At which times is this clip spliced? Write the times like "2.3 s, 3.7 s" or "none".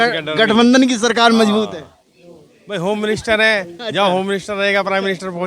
none

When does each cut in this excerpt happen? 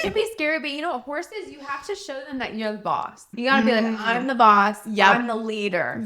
none

